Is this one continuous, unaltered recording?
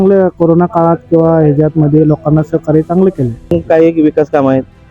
no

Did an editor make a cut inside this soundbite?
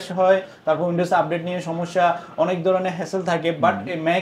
no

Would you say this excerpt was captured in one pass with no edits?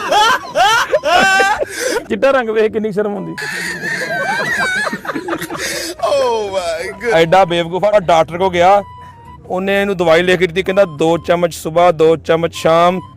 no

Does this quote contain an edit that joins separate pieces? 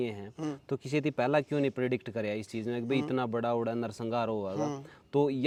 no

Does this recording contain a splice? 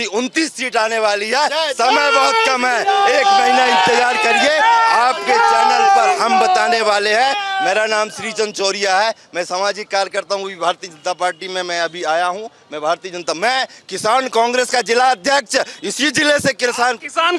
no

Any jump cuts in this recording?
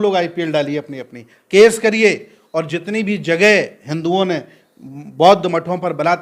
no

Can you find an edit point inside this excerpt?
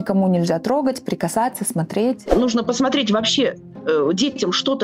yes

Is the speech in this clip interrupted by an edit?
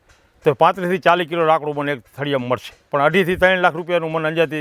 yes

